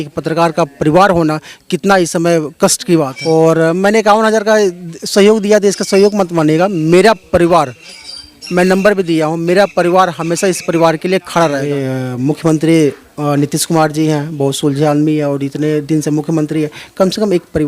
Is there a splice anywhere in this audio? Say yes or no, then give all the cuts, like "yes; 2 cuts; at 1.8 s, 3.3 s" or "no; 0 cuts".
yes; 2 cuts; at 3.1 s, 11.7 s